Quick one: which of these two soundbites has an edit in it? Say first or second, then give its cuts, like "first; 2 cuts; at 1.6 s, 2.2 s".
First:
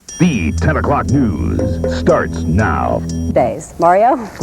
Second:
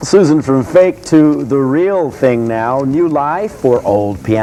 first; 1 cut; at 1.9 s